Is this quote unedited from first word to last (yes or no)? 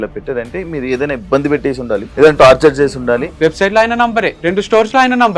no